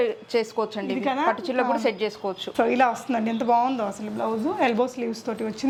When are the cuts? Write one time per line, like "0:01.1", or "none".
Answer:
none